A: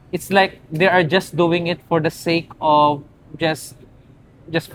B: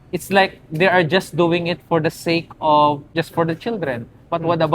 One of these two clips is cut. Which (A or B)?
B